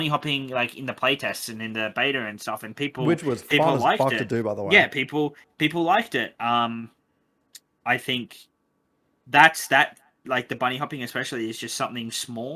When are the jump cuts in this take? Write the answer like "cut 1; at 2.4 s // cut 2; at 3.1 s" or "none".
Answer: none